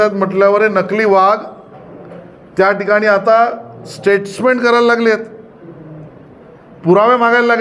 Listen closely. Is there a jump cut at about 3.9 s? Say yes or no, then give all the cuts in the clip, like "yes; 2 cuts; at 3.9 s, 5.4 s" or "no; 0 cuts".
no; 0 cuts